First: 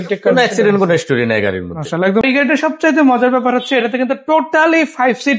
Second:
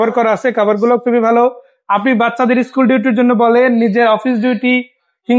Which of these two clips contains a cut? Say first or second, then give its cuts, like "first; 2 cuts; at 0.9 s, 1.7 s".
first; 1 cut; at 2.2 s